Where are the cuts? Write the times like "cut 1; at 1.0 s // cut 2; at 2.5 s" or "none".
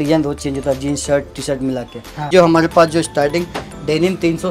cut 1; at 2.3 s